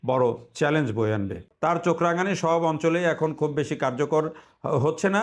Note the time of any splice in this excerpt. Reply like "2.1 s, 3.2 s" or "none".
1.5 s